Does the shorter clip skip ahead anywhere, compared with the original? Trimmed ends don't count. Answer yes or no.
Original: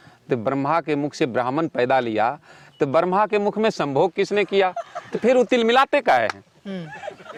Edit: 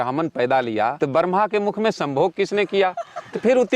yes